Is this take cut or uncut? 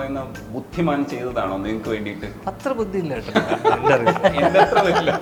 uncut